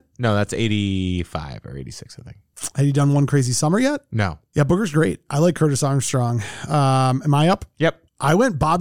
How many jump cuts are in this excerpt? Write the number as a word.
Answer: one